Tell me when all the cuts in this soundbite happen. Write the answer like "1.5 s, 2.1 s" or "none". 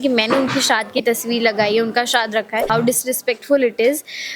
2.7 s